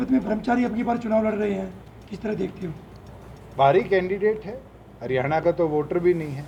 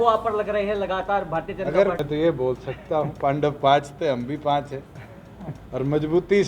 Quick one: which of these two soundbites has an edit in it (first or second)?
second